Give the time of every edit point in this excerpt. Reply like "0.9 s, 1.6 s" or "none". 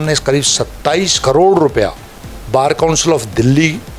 1.1 s

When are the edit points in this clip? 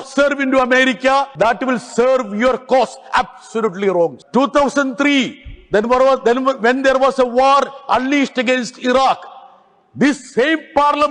1.3 s, 4.2 s

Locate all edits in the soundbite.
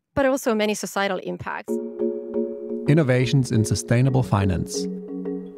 1.6 s

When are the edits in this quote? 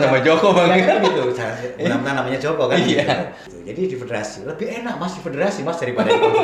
3.5 s

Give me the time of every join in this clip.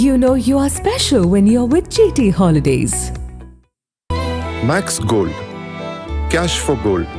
4.0 s

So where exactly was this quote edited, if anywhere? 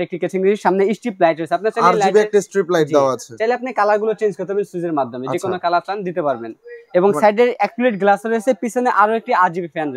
none

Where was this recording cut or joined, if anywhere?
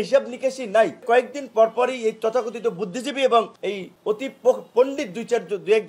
1.0 s

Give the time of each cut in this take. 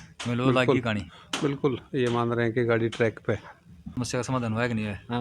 3.8 s

